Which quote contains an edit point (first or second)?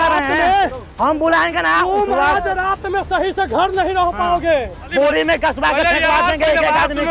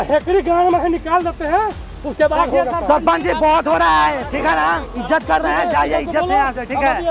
first